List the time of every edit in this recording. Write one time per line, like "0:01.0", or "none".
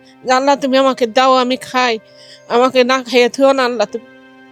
none